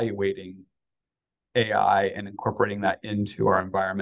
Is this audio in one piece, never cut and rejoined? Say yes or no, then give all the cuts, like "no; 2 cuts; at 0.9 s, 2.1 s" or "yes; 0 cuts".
yes; 0 cuts